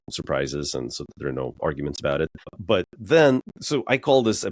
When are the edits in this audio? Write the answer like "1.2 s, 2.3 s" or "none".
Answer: 2.6 s, 3.6 s

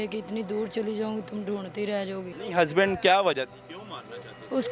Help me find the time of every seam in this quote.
2.3 s

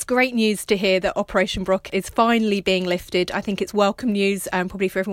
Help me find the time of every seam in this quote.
1.9 s

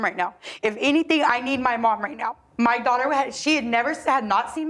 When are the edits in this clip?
none

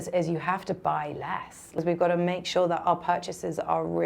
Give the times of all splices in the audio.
1.7 s

